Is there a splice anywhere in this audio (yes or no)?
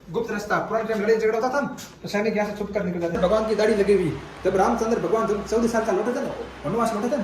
yes